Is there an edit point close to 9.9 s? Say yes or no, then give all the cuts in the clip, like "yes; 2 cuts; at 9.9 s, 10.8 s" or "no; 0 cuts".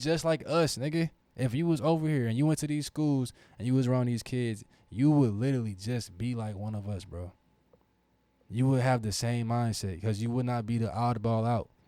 no; 0 cuts